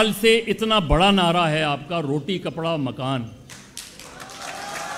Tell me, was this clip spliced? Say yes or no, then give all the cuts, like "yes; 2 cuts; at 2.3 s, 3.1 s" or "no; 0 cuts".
no; 0 cuts